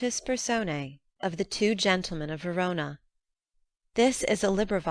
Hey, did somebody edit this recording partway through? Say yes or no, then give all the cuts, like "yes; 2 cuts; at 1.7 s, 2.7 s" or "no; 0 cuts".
yes; 1 cut; at 1.1 s